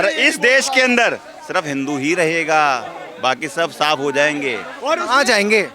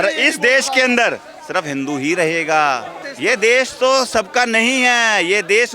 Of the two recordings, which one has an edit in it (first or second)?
second